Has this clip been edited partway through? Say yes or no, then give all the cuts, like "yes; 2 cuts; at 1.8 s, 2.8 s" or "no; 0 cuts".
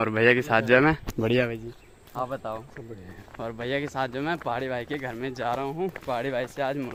no; 0 cuts